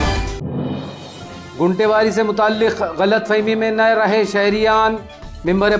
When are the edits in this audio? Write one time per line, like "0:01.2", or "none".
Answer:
0:01.3

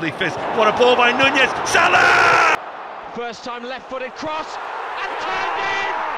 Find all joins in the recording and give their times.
0:02.6

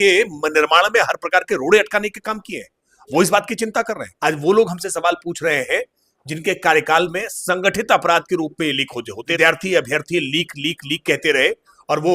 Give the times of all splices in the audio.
0:04.0
0:09.2

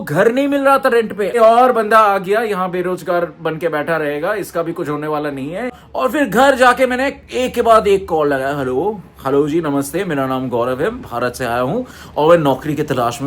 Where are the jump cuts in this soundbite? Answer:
0:01.4
0:05.7

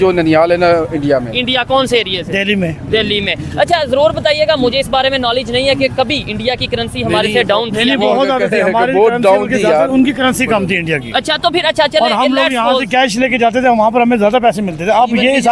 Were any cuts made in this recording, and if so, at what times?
none

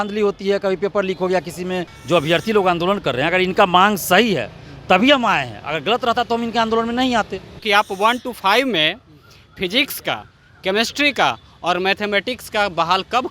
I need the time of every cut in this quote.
0:01.9
0:07.6

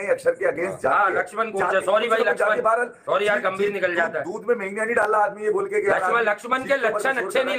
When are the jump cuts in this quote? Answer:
none

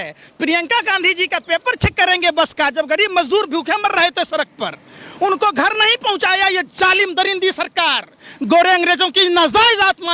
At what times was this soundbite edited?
none

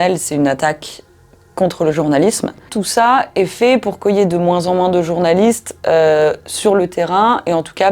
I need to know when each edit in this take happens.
0:02.8

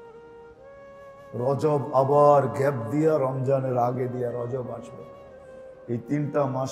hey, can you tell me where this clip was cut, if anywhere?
0:01.3

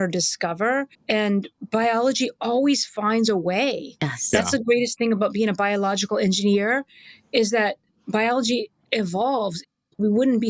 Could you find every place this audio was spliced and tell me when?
0:00.9

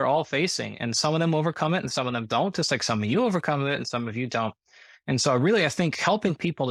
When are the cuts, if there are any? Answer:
none

